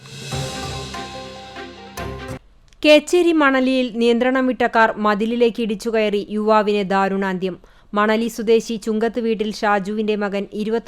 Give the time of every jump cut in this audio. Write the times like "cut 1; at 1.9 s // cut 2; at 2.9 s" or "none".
cut 1; at 2.4 s